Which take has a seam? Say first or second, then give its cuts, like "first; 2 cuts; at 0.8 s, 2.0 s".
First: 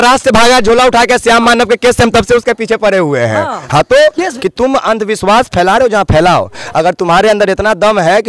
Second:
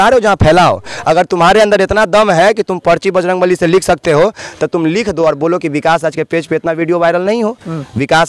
first; 1 cut; at 4.3 s